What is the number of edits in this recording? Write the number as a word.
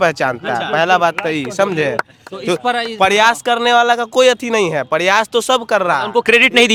zero